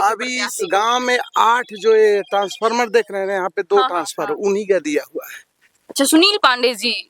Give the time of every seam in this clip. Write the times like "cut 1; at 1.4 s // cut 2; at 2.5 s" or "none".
none